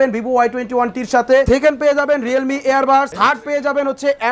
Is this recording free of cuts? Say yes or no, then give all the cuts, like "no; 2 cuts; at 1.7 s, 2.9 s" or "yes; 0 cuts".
no; 2 cuts; at 1.5 s, 3.1 s